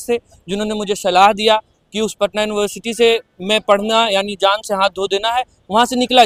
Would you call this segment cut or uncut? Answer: uncut